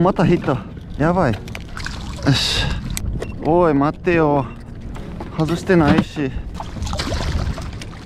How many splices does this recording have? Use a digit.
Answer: 3